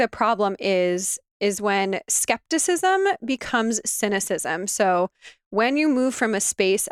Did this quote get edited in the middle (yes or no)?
no